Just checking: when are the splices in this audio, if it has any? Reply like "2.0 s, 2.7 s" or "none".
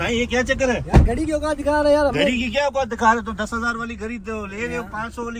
none